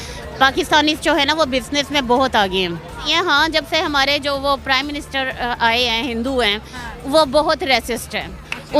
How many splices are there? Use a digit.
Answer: 1